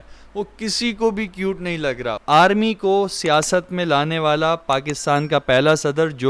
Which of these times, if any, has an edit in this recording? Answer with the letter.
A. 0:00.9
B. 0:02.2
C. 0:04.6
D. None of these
B